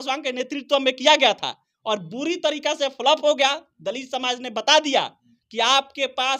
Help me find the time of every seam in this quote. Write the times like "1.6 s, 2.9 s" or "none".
none